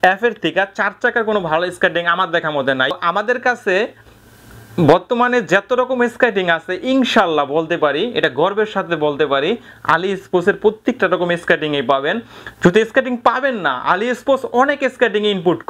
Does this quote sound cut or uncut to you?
uncut